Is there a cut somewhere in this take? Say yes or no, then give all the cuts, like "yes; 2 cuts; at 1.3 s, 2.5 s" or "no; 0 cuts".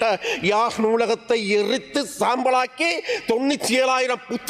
no; 0 cuts